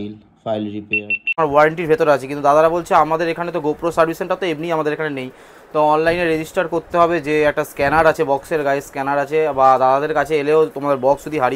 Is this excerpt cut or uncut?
cut